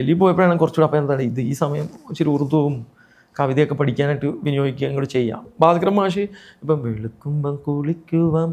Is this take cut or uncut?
cut